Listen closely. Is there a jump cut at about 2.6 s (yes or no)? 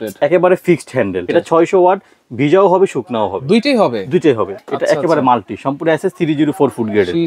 no